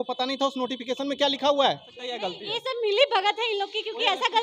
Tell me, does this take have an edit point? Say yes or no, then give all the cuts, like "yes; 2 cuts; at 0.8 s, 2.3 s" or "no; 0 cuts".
yes; 1 cut; at 2.2 s